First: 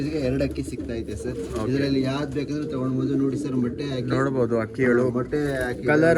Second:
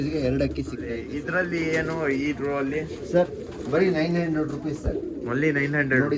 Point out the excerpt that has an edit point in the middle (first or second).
second